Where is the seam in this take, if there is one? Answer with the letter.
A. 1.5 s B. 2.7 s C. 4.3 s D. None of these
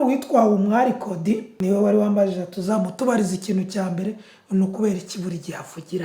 A